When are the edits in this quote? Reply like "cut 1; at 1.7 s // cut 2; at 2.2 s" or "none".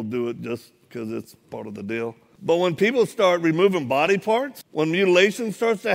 cut 1; at 2.3 s // cut 2; at 4.6 s